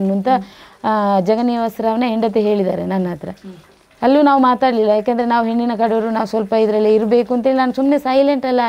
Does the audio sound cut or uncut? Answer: uncut